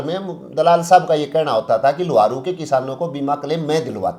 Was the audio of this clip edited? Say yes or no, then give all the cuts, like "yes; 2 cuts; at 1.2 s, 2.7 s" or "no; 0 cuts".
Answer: no; 0 cuts